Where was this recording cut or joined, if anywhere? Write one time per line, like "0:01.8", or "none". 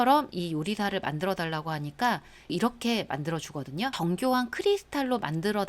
0:02.5
0:03.9